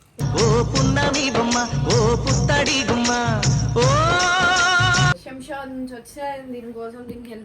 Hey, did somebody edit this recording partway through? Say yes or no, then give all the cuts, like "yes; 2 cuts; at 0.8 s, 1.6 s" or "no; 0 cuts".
yes; 1 cut; at 5.1 s